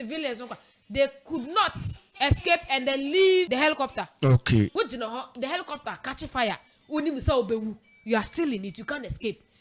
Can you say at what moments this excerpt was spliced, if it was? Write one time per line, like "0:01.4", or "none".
0:03.5
0:04.7